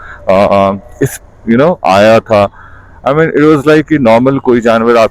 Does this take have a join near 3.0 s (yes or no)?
no